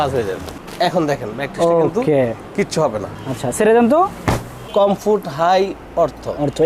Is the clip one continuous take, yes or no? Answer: no